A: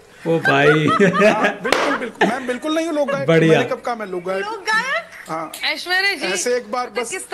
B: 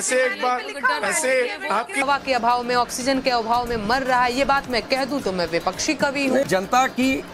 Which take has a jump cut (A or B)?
B